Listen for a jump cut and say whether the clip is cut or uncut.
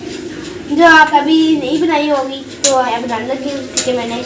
cut